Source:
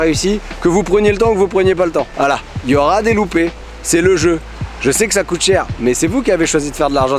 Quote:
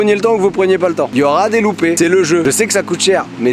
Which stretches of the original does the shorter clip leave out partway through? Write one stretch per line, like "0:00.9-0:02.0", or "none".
0:02.1-0:02.6
0:03.7-0:04.6